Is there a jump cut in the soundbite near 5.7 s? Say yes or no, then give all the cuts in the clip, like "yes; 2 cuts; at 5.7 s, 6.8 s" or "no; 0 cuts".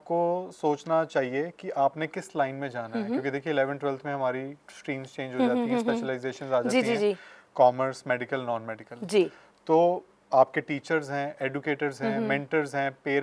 no; 0 cuts